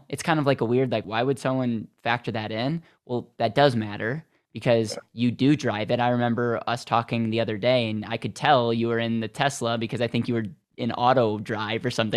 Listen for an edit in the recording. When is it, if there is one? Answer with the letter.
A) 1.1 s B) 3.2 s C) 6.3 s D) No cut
A